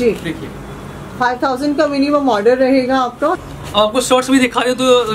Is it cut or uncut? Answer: cut